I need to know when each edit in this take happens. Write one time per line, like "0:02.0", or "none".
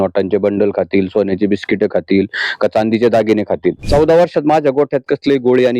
0:03.8